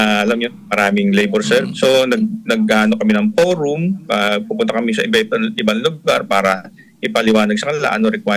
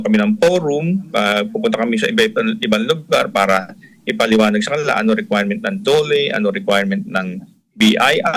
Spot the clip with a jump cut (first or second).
first